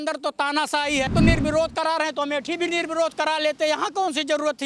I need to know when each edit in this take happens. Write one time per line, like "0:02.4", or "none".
0:01.1